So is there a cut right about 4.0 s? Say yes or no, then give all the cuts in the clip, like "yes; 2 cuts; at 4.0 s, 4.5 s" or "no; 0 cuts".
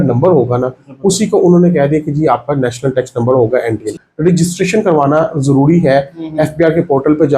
yes; 1 cut; at 4.0 s